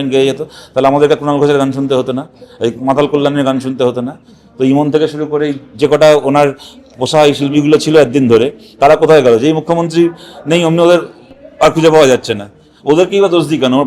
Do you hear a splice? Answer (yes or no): no